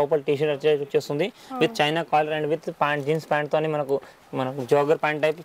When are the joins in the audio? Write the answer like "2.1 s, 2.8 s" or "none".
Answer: none

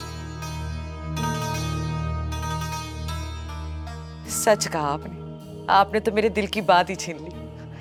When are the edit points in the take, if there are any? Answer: none

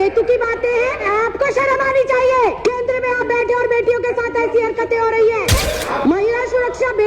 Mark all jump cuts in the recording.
1.1 s, 2.6 s, 5.6 s

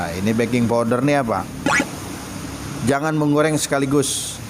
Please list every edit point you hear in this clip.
1.8 s

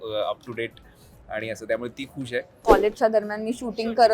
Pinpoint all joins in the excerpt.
2.6 s

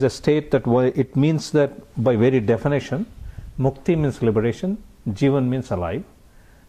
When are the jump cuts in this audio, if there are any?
none

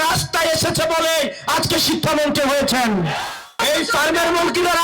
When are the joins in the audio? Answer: 3.5 s

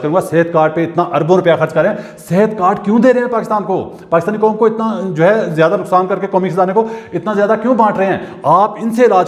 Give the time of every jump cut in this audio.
none

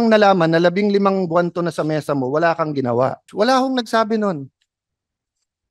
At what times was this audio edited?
3.2 s

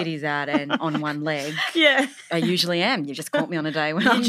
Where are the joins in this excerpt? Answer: 2.2 s

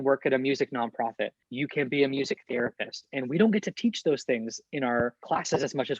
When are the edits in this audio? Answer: 1.4 s, 5.2 s

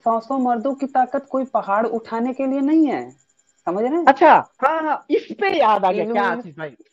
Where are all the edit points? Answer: none

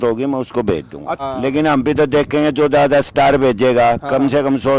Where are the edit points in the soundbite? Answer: 1.2 s

